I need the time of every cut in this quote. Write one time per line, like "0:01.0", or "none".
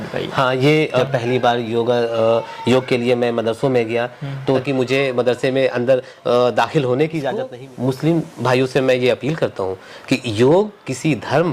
0:01.0
0:04.6
0:07.6